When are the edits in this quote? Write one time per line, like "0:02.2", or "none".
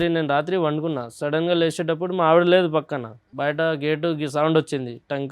0:03.3